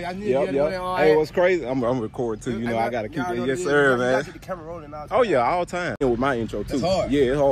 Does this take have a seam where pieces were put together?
yes; 1 cut; at 6.0 s

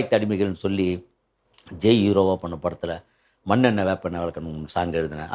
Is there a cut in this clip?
no; 0 cuts

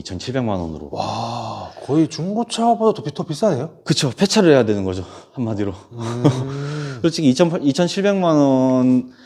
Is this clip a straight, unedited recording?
yes; 0 cuts

